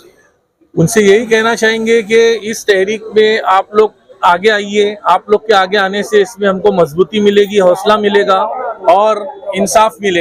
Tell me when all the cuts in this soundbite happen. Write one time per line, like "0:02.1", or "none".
none

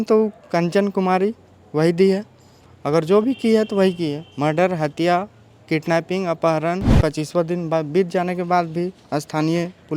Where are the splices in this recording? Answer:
0:06.9

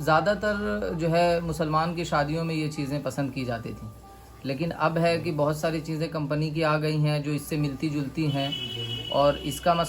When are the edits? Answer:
none

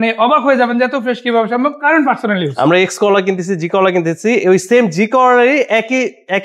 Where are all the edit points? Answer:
none

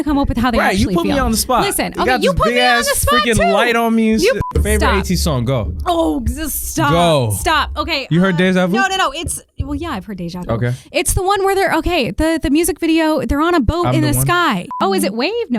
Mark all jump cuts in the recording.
0:04.4
0:14.8

